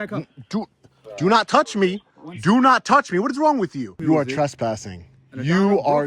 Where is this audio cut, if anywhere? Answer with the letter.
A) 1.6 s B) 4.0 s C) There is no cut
B